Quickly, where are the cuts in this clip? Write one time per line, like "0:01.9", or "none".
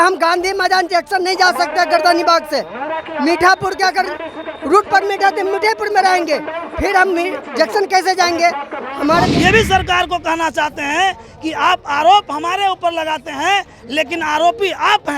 0:09.3